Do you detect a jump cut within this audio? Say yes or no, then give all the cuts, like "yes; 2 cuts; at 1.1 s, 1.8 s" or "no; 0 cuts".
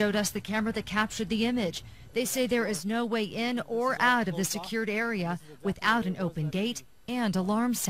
yes; 1 cut; at 2.7 s